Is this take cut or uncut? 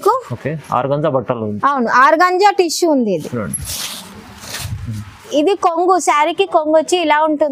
cut